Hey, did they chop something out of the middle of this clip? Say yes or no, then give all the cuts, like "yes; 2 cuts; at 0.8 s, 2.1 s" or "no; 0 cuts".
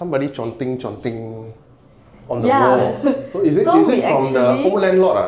no; 0 cuts